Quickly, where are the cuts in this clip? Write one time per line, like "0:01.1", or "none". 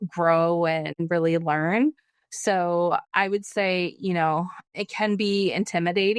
0:01.0
0:04.7